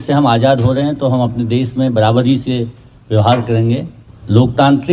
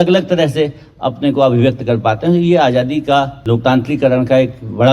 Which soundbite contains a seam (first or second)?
second